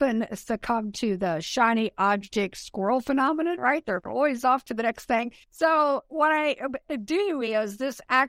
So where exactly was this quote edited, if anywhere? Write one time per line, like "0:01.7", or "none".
0:05.4